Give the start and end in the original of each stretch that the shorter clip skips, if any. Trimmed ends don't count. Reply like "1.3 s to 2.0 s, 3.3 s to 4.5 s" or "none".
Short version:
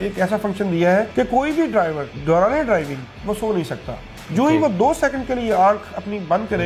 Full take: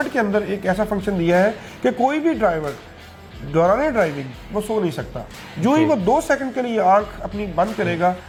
1.6 s to 1.8 s, 2.8 s to 3.4 s